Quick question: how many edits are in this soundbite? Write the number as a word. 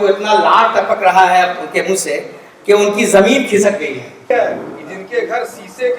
one